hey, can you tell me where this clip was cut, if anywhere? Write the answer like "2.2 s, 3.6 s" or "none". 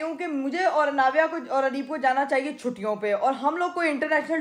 none